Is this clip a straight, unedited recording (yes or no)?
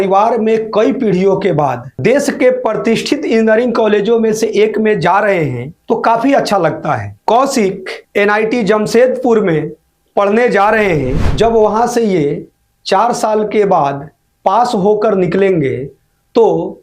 no